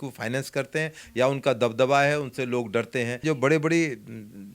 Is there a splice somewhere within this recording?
yes; 1 cut; at 3.2 s

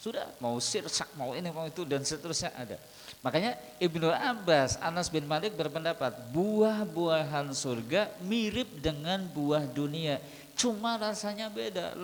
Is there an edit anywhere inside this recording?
no; 0 cuts

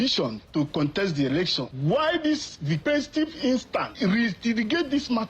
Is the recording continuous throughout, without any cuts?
no; 3 cuts; at 1.7 s, 2.8 s, 3.9 s

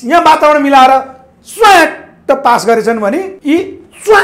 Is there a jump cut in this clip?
yes; 1 cut; at 3.3 s

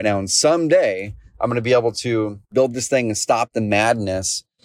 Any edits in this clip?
yes; 1 cut; at 2.5 s

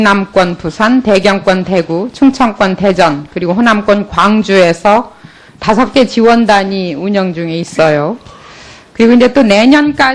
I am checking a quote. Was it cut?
no; 0 cuts

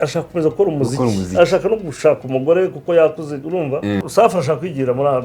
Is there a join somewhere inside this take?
yes; 1 cut; at 4.0 s

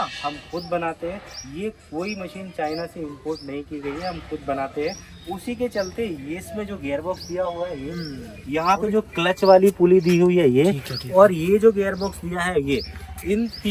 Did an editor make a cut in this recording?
no; 0 cuts

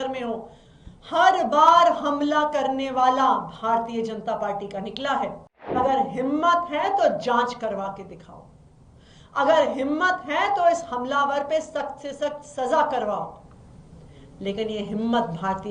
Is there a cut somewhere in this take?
yes; 1 cut; at 5.8 s

